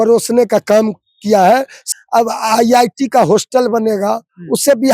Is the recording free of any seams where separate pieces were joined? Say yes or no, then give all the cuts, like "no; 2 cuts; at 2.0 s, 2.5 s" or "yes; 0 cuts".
no; 1 cut; at 1.8 s